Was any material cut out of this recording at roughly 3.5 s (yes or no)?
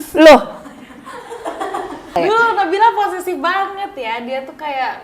no